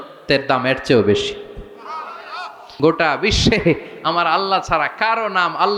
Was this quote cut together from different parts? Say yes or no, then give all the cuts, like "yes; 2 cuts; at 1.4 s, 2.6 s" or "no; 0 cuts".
yes; 1 cut; at 2.7 s